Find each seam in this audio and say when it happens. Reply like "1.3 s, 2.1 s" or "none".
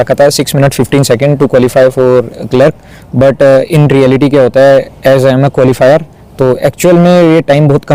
none